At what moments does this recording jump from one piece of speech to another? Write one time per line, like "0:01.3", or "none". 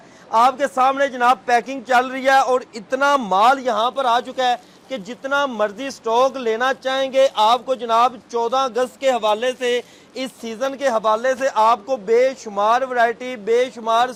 none